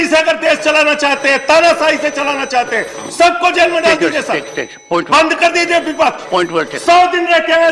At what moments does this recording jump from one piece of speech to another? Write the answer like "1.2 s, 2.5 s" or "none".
none